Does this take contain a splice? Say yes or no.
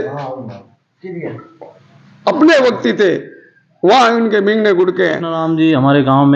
yes